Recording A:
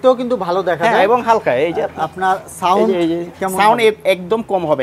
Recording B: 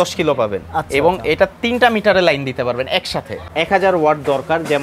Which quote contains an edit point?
B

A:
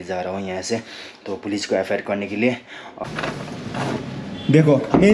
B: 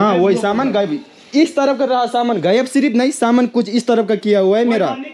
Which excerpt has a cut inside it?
A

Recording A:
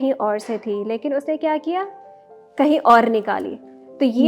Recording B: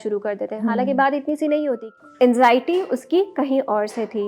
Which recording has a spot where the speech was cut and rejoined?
B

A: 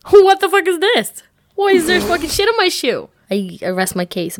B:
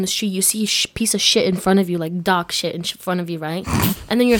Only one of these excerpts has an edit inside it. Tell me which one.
A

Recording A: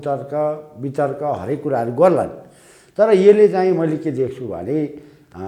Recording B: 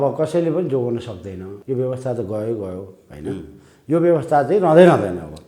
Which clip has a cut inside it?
B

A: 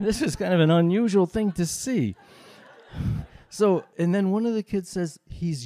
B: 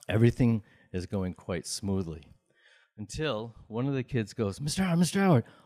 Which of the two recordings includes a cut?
A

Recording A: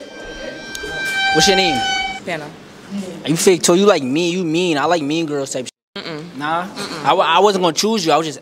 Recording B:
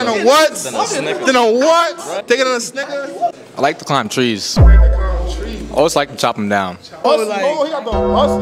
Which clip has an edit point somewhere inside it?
B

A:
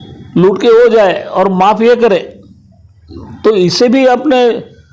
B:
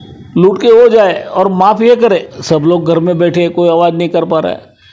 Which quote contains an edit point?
B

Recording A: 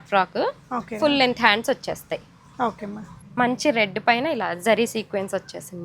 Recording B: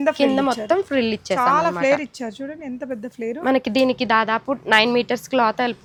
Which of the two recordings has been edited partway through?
A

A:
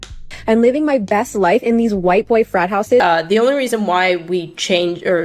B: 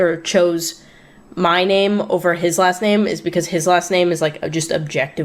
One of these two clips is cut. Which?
A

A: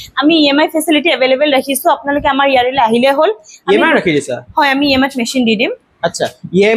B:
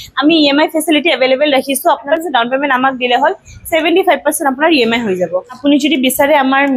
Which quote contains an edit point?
B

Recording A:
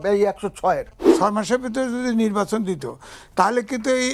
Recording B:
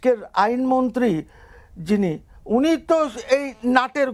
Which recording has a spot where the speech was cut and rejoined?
A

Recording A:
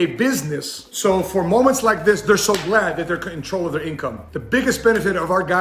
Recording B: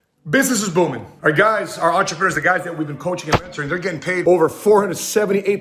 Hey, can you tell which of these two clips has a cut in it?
B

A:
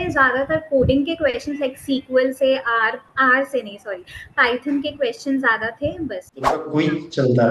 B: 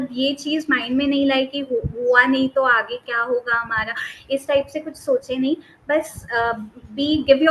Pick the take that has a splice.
A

